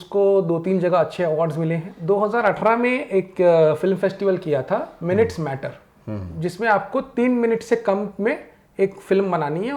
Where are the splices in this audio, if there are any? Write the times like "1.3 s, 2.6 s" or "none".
2.0 s